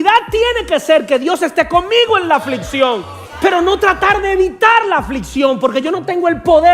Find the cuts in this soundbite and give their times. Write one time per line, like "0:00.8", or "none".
0:03.2